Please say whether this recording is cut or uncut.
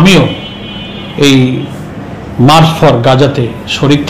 uncut